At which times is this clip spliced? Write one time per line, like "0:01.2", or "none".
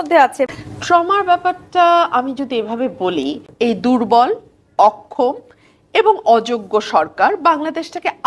none